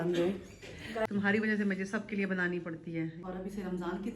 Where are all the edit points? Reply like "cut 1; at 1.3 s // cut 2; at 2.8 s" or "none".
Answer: cut 1; at 1.1 s // cut 2; at 3.2 s